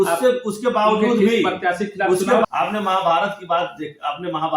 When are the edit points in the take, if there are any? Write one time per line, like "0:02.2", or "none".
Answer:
0:02.5